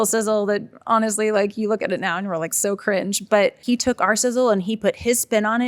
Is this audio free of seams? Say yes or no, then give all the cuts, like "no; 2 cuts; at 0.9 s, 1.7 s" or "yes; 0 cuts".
no; 1 cut; at 3.6 s